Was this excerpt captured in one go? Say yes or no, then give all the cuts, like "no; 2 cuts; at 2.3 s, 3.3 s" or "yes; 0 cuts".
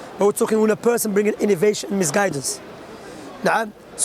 yes; 0 cuts